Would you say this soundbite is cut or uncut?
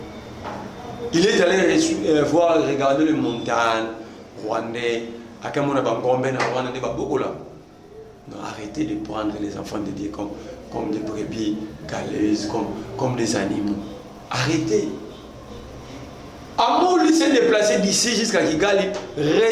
uncut